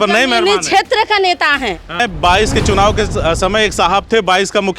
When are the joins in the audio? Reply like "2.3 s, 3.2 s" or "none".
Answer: 2.0 s